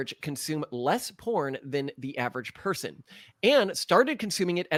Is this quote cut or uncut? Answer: uncut